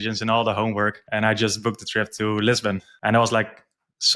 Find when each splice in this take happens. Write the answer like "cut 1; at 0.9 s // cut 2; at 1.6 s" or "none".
cut 1; at 1.0 s // cut 2; at 2.9 s